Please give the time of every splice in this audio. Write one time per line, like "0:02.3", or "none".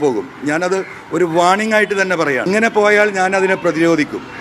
0:02.4